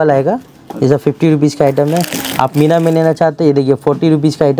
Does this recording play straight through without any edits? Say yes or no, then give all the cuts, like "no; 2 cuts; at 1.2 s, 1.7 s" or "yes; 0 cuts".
yes; 0 cuts